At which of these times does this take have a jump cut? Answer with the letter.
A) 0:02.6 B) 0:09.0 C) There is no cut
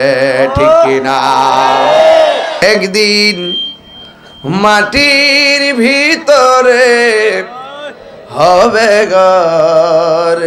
A